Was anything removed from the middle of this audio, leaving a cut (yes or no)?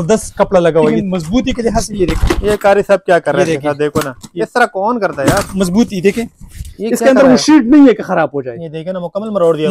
yes